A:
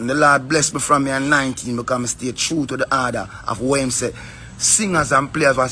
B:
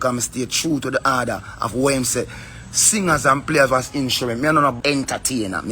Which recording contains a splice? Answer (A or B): B